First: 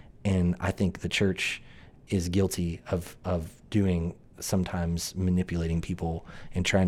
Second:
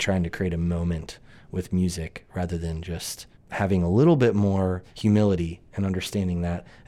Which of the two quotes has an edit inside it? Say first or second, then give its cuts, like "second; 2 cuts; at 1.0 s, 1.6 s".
second; 2 cuts; at 3.3 s, 4.9 s